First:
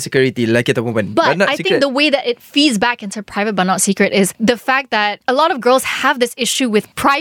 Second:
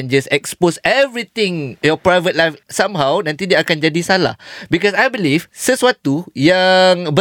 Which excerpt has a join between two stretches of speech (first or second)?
first